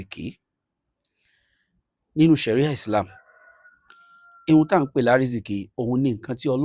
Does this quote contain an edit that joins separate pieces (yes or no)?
no